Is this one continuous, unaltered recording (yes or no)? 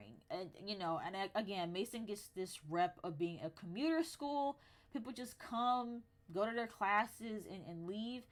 yes